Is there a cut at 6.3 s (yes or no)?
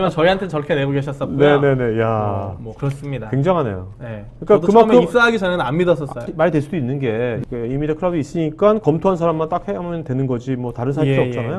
yes